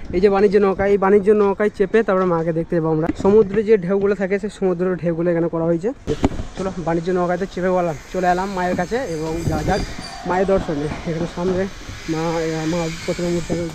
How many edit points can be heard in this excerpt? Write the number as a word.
two